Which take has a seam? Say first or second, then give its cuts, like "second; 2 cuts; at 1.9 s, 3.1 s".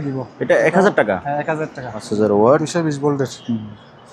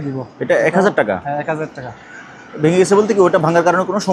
first; 1 cut; at 2.1 s